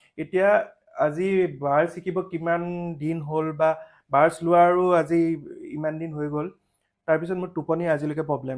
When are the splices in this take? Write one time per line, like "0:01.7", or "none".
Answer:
none